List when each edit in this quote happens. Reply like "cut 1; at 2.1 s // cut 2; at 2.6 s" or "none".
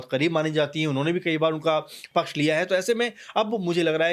none